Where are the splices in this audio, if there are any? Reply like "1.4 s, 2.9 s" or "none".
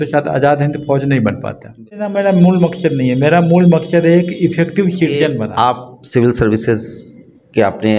2.1 s, 5.4 s